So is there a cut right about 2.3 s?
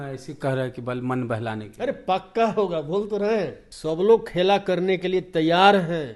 no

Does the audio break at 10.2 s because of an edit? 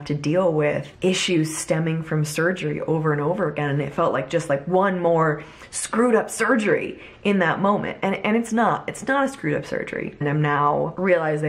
yes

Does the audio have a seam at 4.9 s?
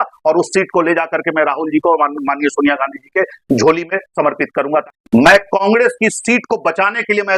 yes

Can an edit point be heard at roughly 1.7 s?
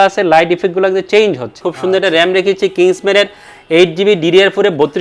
yes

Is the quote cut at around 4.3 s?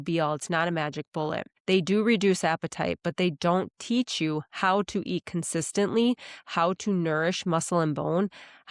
no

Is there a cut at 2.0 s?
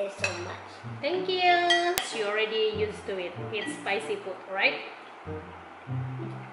yes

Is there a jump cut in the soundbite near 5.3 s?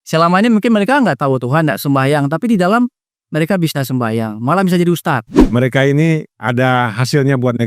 yes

